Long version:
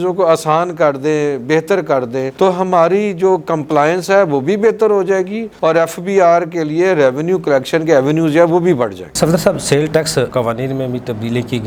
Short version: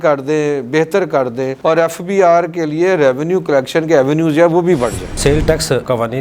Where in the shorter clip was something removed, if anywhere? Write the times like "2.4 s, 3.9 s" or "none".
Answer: 1.5 s, 5.1 s